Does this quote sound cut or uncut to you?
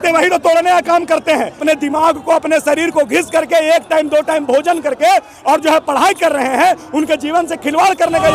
cut